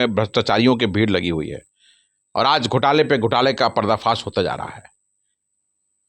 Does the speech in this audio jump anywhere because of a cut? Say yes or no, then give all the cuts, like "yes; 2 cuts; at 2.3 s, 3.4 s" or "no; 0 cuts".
no; 0 cuts